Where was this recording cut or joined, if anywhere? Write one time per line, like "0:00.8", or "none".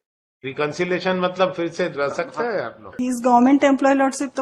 0:02.9